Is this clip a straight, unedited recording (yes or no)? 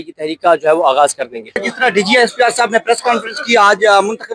no